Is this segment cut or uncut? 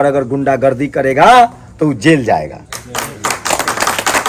uncut